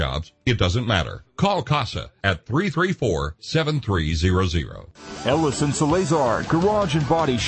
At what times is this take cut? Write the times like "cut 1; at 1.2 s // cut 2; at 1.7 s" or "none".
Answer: cut 1; at 5.0 s